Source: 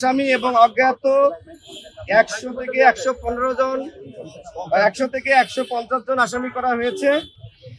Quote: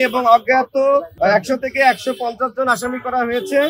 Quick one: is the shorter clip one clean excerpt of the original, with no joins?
no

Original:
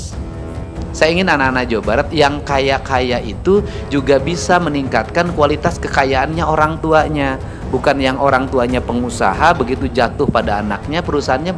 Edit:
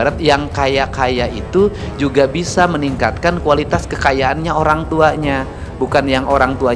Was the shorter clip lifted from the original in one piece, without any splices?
yes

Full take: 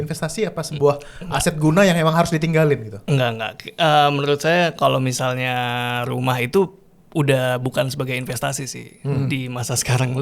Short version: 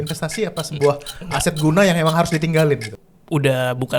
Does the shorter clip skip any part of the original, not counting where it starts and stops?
yes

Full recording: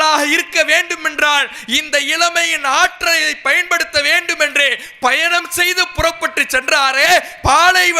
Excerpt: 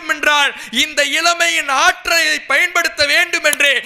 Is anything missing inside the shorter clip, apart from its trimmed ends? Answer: no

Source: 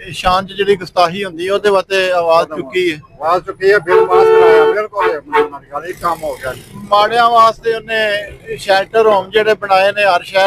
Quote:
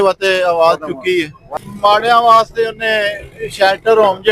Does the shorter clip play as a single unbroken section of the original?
no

